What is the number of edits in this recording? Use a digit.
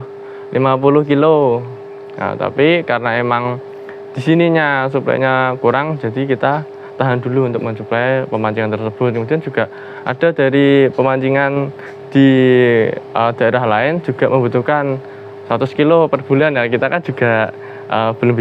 0